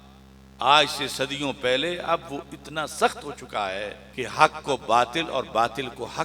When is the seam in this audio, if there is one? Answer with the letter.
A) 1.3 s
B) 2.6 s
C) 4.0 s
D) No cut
C